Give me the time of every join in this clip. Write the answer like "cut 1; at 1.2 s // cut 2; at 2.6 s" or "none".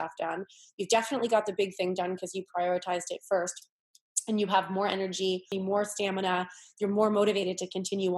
cut 1; at 5.5 s